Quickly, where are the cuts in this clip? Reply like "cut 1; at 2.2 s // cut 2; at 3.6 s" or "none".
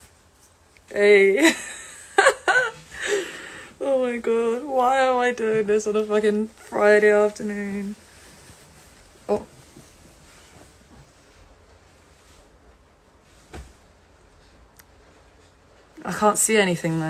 none